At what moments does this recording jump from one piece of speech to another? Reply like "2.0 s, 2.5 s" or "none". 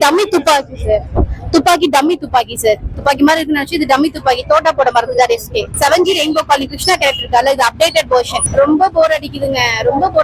2.9 s, 5.6 s, 8.4 s